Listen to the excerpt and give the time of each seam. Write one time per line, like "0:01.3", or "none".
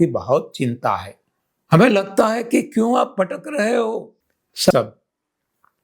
0:04.7